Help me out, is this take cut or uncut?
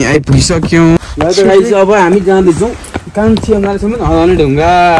cut